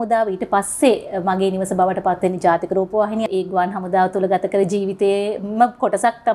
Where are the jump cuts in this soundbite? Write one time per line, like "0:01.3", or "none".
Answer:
0:03.3